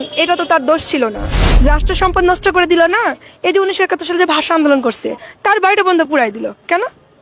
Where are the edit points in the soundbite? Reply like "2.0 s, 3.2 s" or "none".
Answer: 1.4 s